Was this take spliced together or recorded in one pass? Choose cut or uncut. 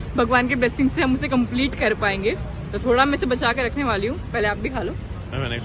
uncut